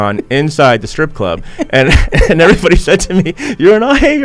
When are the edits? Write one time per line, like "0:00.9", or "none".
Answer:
none